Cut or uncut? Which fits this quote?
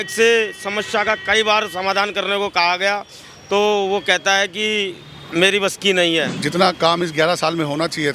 cut